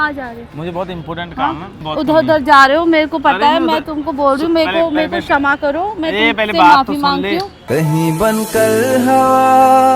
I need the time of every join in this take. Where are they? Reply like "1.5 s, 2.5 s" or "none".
1.8 s